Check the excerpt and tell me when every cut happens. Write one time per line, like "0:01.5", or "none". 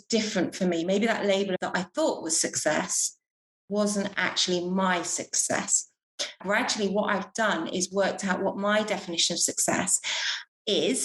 0:01.6
0:06.4